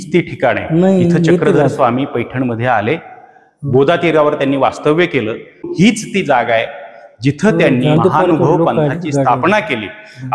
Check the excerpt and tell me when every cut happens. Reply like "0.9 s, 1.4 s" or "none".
8.0 s